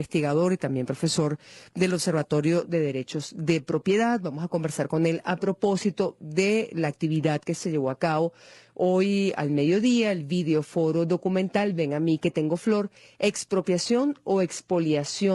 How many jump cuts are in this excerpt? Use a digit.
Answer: 1